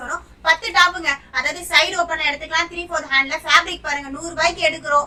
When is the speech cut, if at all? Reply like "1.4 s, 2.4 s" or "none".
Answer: none

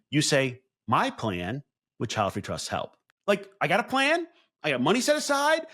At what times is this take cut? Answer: 3.0 s

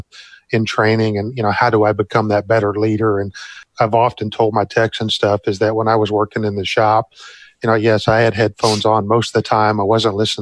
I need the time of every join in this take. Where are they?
3.6 s

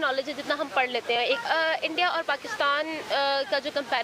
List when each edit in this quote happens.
1.4 s

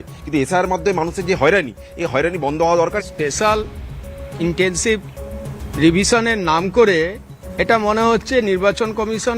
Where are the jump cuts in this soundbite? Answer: 3.0 s

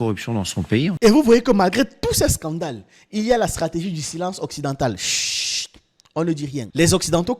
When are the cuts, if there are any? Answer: 1.0 s

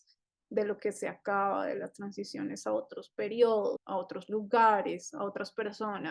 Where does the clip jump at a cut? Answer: 3.8 s

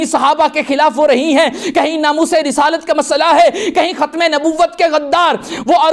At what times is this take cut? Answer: none

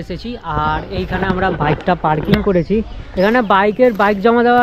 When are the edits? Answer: 3.0 s

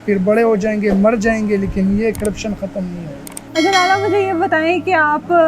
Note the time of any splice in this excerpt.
none

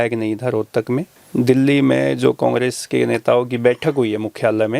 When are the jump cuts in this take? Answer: 1.1 s

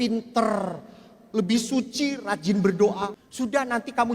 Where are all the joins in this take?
3.1 s

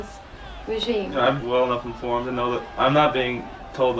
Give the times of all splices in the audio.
1.3 s, 2.7 s

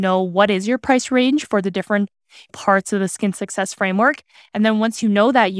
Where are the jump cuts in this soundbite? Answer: none

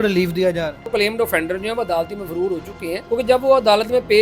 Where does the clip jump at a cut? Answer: 0.9 s, 3.0 s

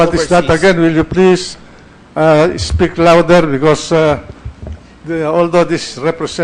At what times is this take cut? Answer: 3.7 s

